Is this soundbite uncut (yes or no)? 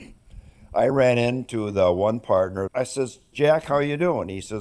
no